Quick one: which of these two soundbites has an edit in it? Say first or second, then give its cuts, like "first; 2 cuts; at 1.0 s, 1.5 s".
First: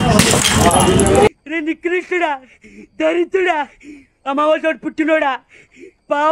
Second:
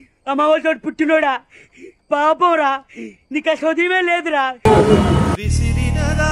first; 1 cut; at 1.3 s